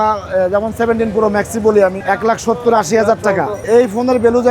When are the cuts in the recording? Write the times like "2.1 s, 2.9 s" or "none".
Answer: 2.0 s, 3.6 s